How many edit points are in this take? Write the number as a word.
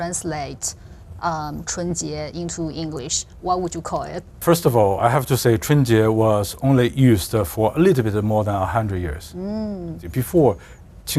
zero